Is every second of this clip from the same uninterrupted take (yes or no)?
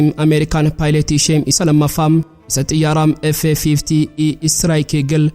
yes